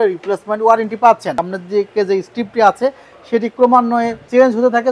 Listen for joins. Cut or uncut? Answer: cut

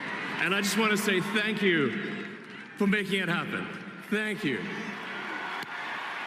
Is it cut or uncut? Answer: uncut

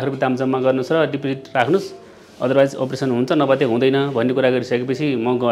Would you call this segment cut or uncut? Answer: uncut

